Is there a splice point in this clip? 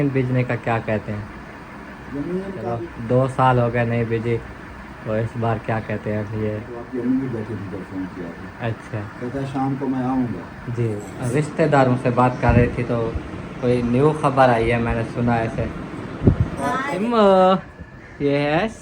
yes; 4 cuts; at 2.7 s, 6.8 s, 11.1 s, 17.0 s

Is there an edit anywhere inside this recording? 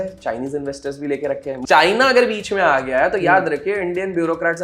yes; 1 cut; at 1.5 s

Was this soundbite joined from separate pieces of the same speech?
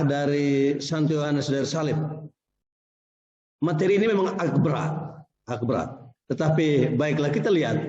no; 0 cuts

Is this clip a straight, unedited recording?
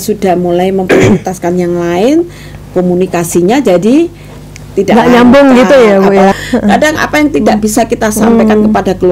no; 1 cut; at 6.3 s

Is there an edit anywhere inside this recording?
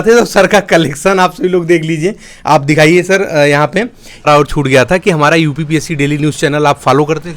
yes; 1 cut; at 4.3 s

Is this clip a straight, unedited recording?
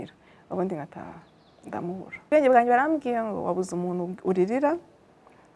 no; 1 cut; at 2.3 s

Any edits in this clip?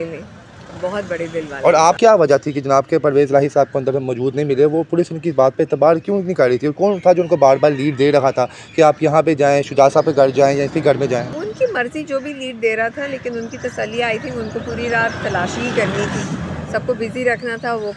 yes; 2 cuts; at 2.0 s, 11.3 s

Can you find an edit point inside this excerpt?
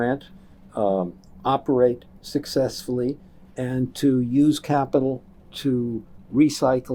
no; 0 cuts

